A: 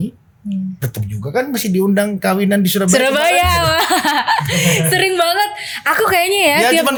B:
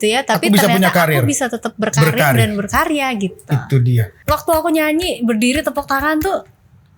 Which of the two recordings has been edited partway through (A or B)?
B